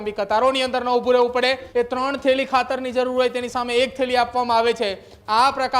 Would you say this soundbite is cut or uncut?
cut